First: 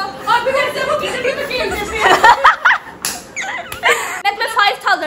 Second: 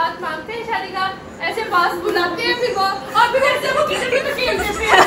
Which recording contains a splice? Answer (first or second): first